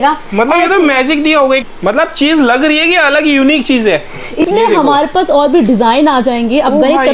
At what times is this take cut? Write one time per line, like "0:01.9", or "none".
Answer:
0:01.6
0:04.4